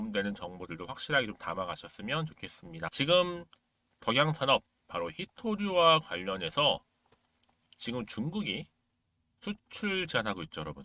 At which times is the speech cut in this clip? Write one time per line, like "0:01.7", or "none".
0:02.9